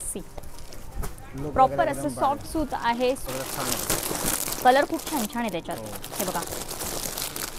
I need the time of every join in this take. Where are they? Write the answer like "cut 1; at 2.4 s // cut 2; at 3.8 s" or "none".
cut 1; at 3.3 s